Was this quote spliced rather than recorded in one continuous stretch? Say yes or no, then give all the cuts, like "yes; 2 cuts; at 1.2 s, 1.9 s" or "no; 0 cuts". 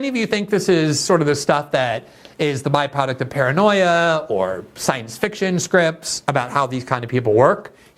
no; 0 cuts